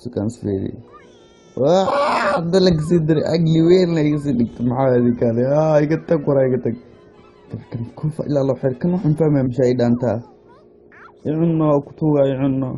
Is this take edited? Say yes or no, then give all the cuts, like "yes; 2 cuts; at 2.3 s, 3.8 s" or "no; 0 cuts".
no; 0 cuts